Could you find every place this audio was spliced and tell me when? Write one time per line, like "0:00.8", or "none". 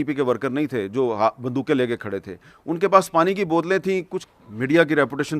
0:04.1